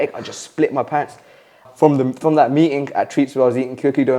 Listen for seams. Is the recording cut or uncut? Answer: cut